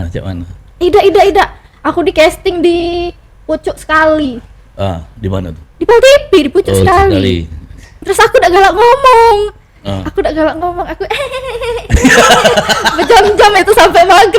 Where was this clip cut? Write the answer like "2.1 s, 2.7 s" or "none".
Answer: 8.0 s